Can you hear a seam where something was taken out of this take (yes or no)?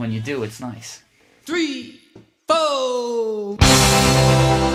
no